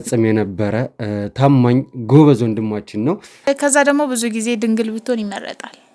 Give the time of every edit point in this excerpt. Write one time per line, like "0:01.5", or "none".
0:03.5